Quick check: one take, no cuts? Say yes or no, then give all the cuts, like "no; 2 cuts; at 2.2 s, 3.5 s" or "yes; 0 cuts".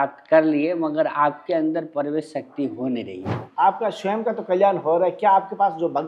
no; 1 cut; at 3.4 s